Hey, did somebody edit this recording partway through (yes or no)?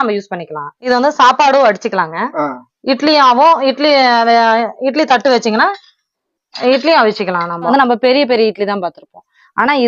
yes